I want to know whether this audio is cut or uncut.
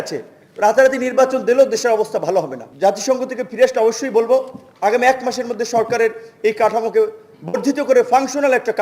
cut